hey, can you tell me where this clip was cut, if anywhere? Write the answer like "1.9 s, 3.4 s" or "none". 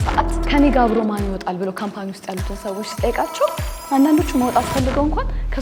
none